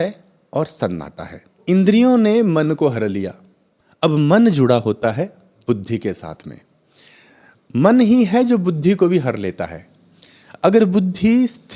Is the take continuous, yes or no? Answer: no